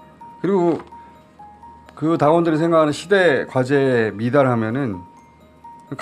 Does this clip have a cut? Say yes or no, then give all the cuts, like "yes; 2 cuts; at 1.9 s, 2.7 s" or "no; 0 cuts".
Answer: no; 0 cuts